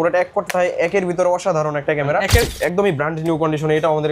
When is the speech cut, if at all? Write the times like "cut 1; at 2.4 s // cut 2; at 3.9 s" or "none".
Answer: cut 1; at 2.5 s